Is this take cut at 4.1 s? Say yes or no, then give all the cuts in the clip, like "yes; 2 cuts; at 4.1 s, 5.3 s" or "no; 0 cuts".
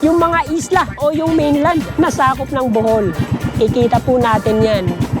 no; 1 cut; at 1.9 s